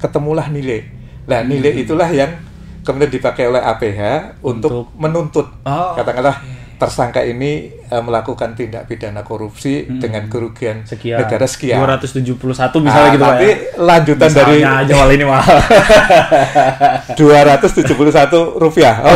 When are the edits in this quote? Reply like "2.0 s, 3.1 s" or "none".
none